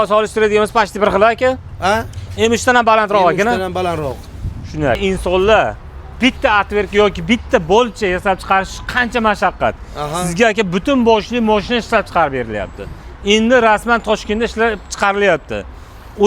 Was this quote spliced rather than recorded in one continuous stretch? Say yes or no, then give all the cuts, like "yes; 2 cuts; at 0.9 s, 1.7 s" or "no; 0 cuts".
yes; 1 cut; at 5.0 s